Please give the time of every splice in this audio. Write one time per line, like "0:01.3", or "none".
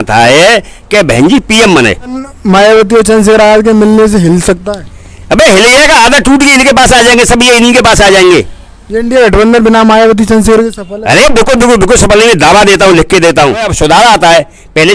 0:02.3
0:13.7